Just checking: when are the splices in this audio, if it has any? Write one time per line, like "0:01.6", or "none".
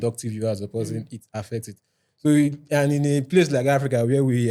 none